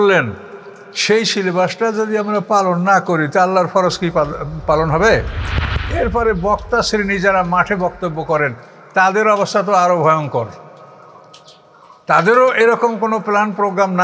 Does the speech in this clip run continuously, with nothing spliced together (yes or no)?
no